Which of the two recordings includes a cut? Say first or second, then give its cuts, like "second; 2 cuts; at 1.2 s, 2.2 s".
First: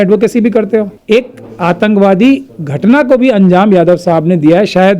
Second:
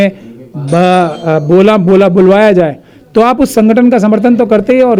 first; 1 cut; at 0.9 s